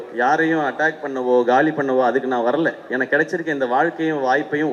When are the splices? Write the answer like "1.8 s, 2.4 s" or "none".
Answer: none